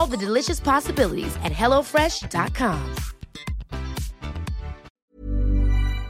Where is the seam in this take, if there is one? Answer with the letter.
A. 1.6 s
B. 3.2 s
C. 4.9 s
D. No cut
C